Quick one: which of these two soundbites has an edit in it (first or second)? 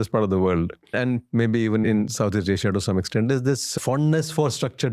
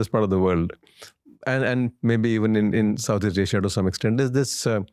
first